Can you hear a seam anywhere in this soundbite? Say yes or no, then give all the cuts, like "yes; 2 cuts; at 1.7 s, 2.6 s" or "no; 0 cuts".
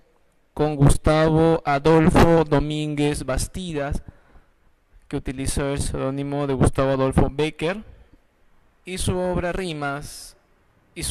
yes; 1 cut; at 8.9 s